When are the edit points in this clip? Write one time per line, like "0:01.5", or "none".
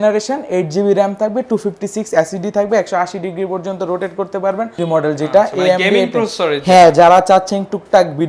0:04.8